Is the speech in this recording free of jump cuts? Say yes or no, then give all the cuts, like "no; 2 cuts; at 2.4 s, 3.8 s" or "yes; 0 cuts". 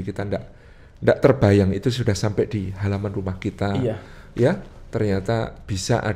yes; 0 cuts